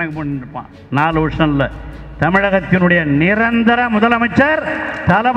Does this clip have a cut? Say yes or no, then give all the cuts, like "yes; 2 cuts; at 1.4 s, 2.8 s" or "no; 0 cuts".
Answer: no; 0 cuts